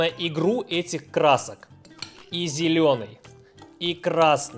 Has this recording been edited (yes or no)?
no